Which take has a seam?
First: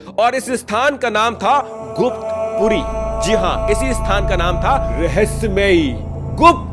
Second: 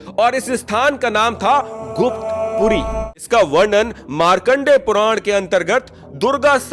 second; 1 cut; at 3.2 s

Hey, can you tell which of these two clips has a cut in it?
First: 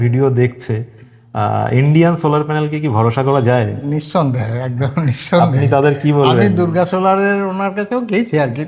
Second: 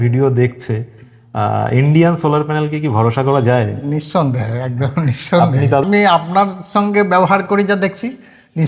second; 1 cut; at 5.8 s

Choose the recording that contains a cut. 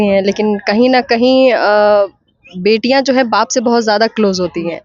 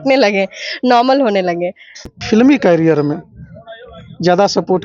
second; 1 cut; at 2.2 s

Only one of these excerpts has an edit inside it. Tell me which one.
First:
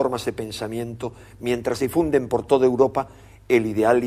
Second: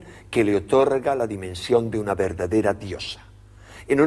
first; 1 cut; at 2.6 s

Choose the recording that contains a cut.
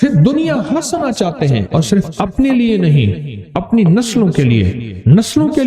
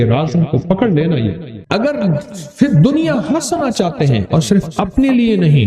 second; 1 cut; at 1.5 s

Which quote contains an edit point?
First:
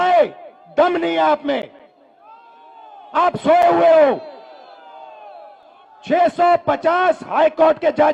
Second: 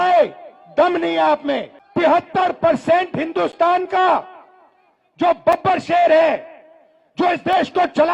second; 1 cut; at 1.8 s

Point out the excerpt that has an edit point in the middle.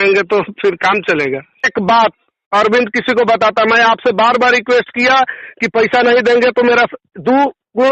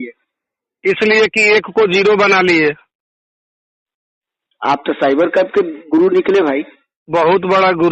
first; 1 cut; at 1.7 s

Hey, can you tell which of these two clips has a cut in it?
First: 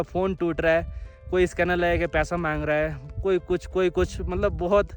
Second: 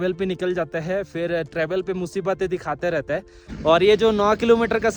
second; 1 cut; at 3.4 s

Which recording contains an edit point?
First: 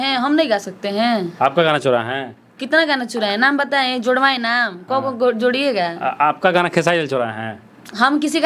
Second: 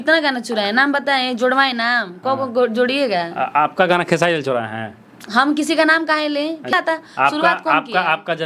second; 1 cut; at 6.7 s

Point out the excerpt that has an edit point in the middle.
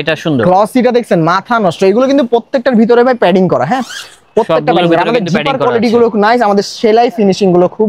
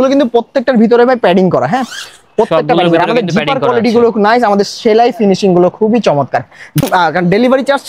second; 1 cut; at 6.8 s

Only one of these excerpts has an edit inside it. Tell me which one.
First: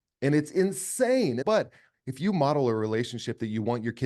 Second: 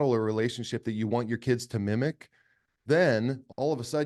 first; 1 cut; at 1.5 s

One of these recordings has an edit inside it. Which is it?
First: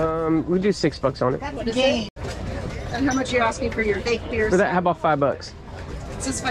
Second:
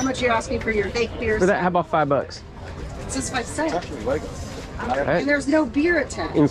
first; 1 cut; at 2.2 s

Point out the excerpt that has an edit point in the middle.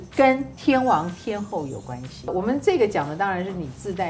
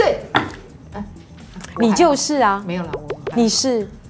first; 1 cut; at 2.3 s

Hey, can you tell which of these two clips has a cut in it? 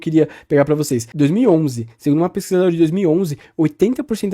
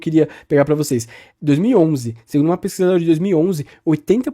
first; 1 cut; at 1.0 s

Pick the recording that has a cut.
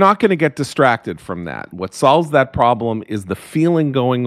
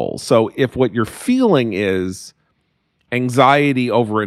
first; 1 cut; at 1.6 s

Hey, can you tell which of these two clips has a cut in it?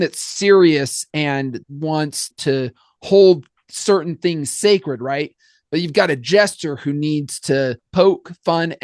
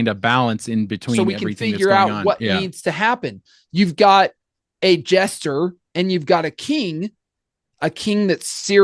first; 2 cuts; at 1.6 s, 7.8 s

